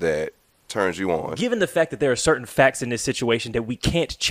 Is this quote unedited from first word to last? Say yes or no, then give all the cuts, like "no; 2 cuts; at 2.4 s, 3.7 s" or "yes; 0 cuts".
no; 1 cut; at 1.3 s